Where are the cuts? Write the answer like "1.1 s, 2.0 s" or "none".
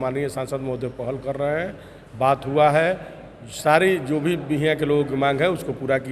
none